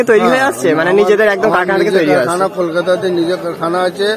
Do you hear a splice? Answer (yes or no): no